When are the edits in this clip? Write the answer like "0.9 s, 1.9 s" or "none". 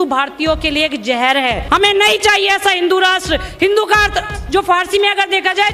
1.6 s